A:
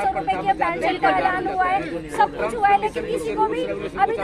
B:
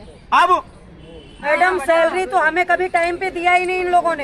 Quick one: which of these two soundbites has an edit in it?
B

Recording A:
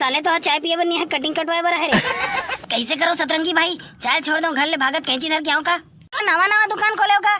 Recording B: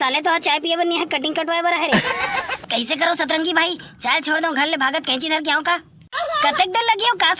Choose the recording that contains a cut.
A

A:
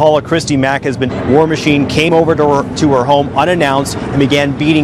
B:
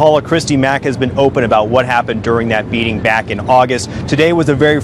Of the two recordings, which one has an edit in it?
B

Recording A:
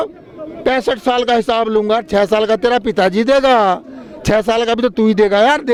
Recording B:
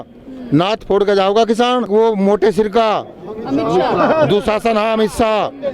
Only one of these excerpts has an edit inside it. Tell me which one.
B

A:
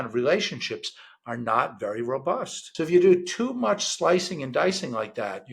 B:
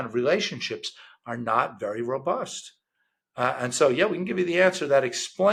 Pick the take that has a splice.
A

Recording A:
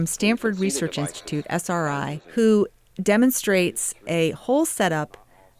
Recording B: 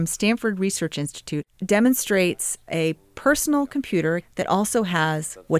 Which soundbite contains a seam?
B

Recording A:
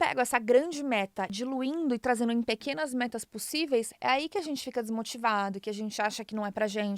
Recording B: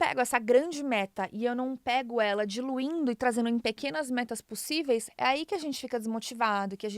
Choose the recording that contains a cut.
A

